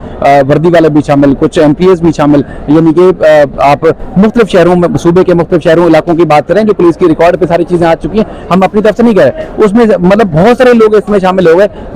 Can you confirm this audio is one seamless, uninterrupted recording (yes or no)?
yes